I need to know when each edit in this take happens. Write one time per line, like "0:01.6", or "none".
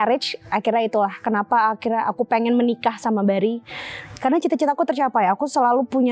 none